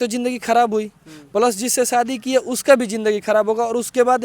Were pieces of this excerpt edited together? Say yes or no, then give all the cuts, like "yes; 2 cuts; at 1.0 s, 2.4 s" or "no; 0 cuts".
no; 0 cuts